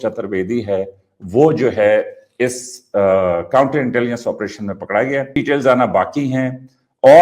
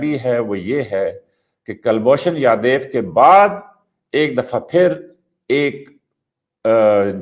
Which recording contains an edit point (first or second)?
first